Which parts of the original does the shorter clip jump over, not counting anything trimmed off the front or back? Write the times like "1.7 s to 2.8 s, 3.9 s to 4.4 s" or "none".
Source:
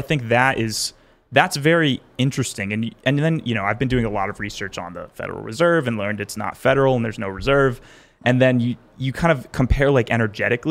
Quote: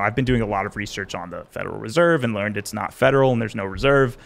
none